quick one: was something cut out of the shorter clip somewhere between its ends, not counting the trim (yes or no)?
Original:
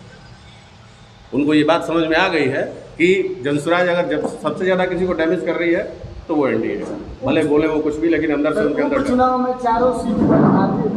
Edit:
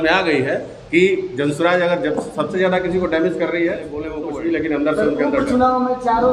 yes